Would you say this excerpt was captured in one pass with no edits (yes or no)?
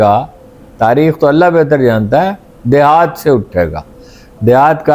yes